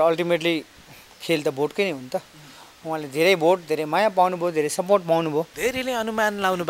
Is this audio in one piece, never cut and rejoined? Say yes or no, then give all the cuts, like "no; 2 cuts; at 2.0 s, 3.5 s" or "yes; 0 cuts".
no; 1 cut; at 5.5 s